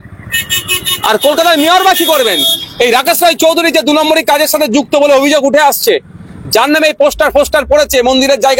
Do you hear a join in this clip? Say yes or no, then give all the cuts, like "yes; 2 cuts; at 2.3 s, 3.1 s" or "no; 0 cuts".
no; 0 cuts